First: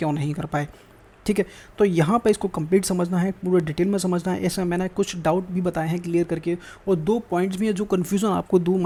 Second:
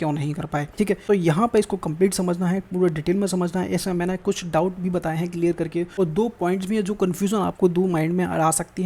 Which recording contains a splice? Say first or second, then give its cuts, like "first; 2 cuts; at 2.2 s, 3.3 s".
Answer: second; 2 cuts; at 0.9 s, 5.9 s